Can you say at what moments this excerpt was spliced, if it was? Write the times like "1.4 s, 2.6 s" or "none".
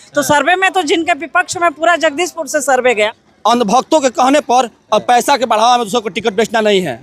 3.1 s

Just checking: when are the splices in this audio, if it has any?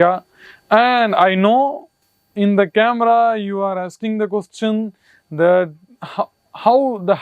none

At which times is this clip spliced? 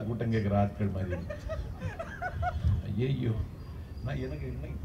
none

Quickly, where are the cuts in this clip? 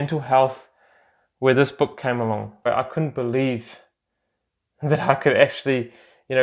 2.7 s

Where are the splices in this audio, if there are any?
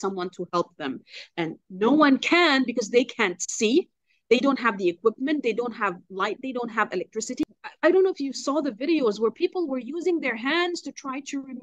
7.4 s

